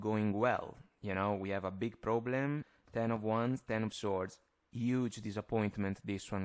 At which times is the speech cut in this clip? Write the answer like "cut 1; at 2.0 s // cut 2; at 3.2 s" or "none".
cut 1; at 2.7 s